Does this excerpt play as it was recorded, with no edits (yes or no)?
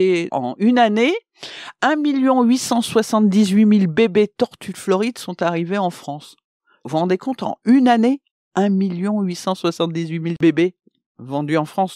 yes